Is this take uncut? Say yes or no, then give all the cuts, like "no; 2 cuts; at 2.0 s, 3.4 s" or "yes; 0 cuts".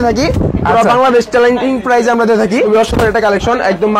no; 1 cut; at 2.7 s